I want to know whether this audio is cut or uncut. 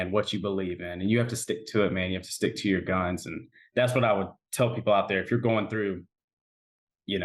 uncut